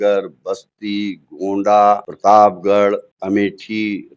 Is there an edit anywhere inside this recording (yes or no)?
yes